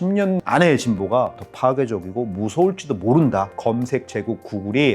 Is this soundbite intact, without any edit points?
no; 2 cuts; at 1.4 s, 3.6 s

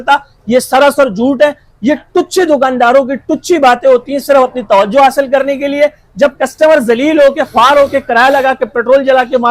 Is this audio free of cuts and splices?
yes; 0 cuts

